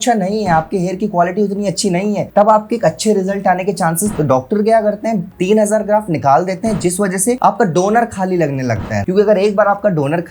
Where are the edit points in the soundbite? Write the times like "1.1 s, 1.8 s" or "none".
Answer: 4.1 s, 9.0 s